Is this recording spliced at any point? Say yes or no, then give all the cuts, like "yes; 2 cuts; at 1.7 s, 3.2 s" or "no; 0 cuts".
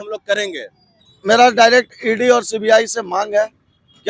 yes; 1 cut; at 1.1 s